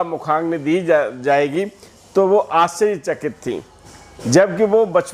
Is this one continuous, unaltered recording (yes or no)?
yes